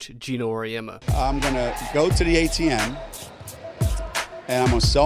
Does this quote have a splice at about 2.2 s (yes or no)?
yes